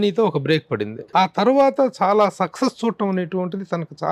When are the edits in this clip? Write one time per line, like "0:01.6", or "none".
0:01.0